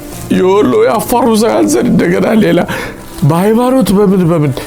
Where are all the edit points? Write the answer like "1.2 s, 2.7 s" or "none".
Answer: none